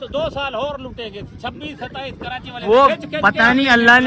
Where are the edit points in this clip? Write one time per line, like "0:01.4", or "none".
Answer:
none